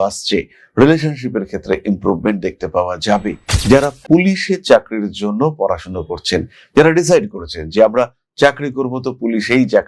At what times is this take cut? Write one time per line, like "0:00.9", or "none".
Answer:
0:03.5